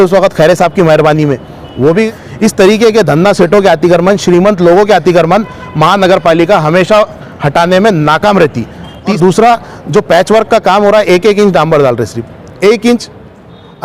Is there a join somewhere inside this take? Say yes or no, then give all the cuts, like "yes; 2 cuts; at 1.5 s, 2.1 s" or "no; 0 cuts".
yes; 2 cuts; at 2.2 s, 9.2 s